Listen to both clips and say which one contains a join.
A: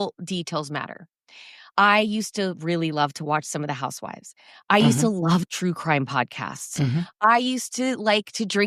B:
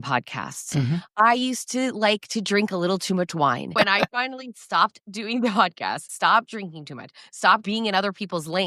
B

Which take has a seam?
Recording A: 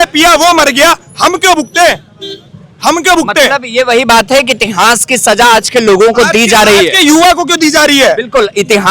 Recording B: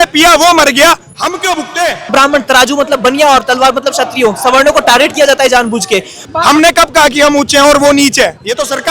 B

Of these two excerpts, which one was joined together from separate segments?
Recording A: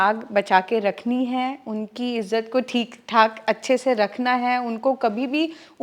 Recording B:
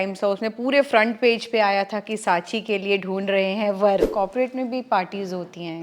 B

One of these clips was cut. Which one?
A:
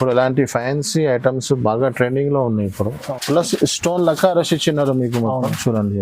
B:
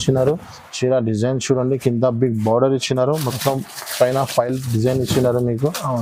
A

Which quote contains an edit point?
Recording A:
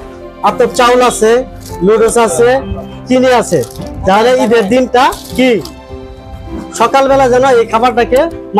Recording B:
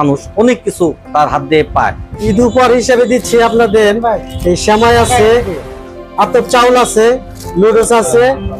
B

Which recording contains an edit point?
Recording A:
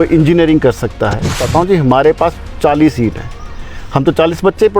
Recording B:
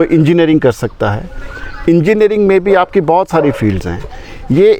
A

